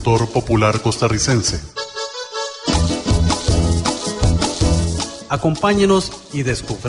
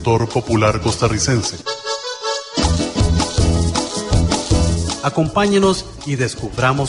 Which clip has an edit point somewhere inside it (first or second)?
second